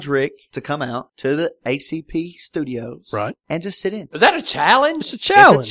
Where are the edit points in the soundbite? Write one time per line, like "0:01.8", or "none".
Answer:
0:04.1